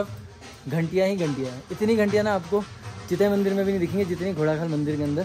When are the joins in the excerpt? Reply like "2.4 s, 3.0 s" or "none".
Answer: none

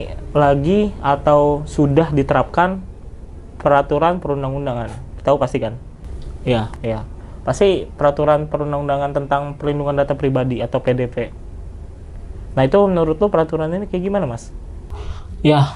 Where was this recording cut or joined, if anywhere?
none

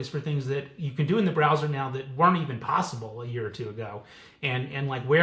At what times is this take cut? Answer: none

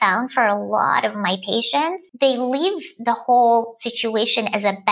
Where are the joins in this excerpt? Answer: 2.0 s

